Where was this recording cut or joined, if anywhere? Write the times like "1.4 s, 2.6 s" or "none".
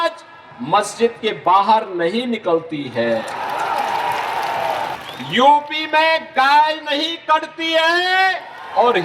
5.0 s